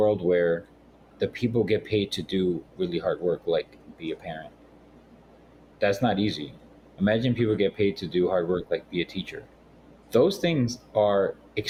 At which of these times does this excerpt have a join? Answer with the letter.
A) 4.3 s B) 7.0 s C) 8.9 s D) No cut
D